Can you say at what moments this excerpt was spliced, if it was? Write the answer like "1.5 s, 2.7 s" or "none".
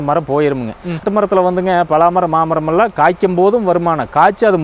1.1 s